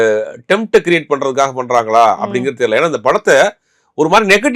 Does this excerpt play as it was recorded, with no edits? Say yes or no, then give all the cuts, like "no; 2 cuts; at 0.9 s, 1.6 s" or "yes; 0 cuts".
yes; 0 cuts